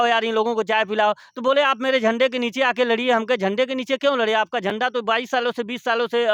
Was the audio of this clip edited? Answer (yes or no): no